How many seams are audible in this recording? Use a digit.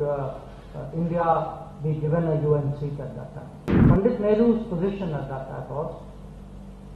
1